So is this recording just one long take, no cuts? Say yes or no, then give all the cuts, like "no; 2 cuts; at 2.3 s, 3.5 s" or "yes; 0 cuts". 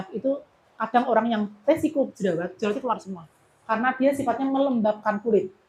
yes; 0 cuts